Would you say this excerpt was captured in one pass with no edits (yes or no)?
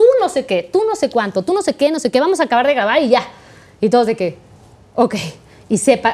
yes